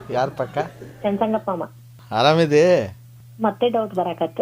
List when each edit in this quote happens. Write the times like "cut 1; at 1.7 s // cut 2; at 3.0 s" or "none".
cut 1; at 1.9 s